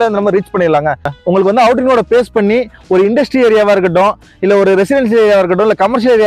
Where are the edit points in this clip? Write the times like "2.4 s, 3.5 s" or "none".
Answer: 1.1 s

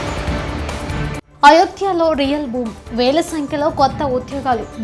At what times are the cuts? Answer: 1.3 s

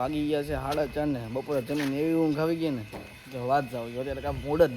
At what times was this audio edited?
none

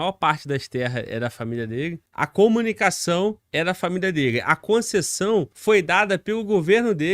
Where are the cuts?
2.0 s, 3.4 s, 5.5 s

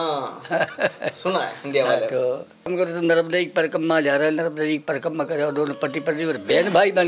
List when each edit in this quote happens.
2.7 s

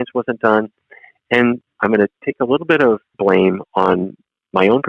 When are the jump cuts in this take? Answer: 1.8 s, 3.1 s

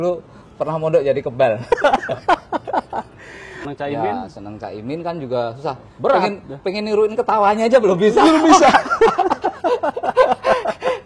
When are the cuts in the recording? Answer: 3.6 s

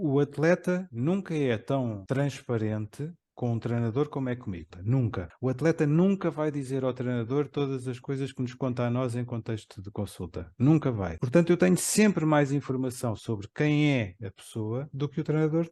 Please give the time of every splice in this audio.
0.9 s, 2.0 s, 4.9 s, 11.1 s

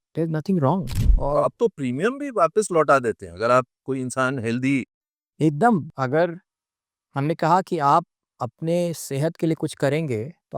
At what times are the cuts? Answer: 1.0 s, 5.9 s

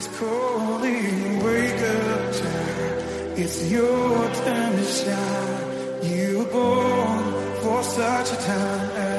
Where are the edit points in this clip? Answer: none

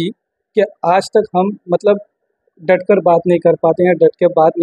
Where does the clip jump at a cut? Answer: none

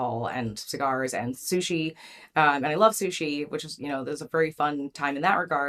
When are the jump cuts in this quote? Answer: none

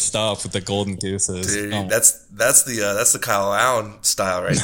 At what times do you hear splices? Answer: none

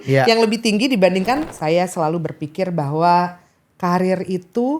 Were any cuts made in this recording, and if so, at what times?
1.5 s

